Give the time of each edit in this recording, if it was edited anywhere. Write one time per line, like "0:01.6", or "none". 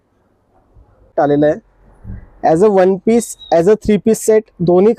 0:01.1